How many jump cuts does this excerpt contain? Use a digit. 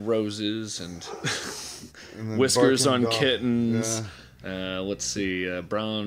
0